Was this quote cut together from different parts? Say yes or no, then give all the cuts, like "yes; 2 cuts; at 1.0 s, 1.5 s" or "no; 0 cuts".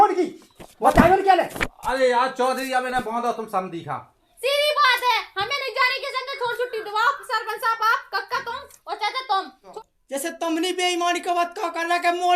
yes; 2 cuts; at 4.3 s, 9.7 s